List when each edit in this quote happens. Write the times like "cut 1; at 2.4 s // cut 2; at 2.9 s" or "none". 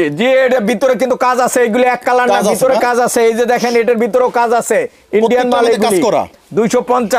none